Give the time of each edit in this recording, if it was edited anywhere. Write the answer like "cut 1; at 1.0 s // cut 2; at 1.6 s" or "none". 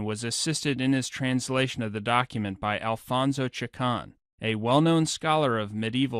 cut 1; at 3.4 s